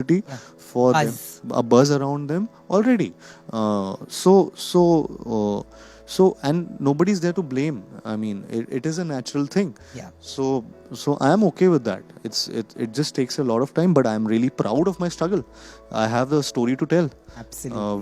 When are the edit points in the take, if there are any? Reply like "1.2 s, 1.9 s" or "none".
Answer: none